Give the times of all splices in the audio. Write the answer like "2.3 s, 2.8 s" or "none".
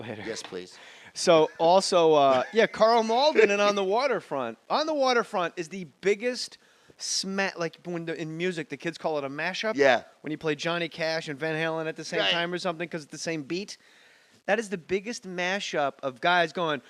6.5 s